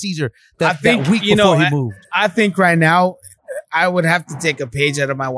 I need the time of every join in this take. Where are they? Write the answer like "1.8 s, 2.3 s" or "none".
none